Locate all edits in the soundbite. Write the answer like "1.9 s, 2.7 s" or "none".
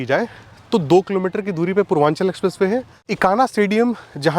3.0 s